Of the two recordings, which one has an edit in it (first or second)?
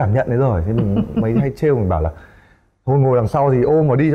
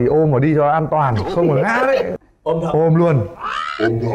second